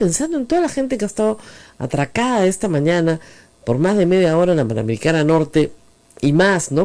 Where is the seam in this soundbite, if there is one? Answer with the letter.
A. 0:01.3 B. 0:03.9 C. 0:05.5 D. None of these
D